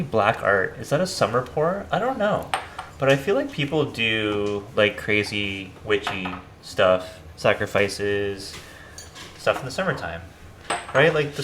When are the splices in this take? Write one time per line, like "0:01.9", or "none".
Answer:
none

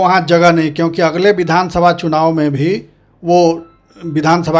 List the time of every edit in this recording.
none

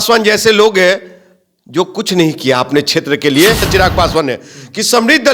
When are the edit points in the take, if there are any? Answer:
0:03.6

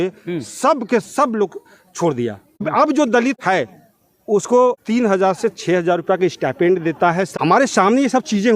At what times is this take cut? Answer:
0:02.7
0:03.4
0:04.8
0:07.3

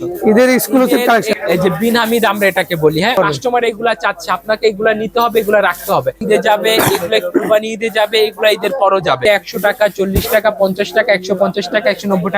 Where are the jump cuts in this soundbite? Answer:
0:01.3
0:03.1
0:06.2
0:09.2

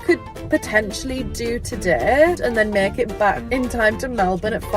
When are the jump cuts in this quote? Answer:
0:02.4
0:03.4

